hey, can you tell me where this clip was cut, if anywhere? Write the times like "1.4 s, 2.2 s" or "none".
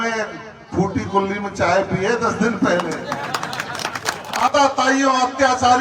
4.5 s